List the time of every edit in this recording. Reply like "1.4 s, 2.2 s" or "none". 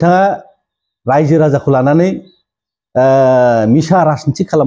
none